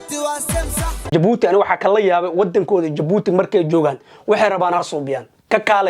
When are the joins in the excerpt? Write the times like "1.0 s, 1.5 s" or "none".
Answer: 1.1 s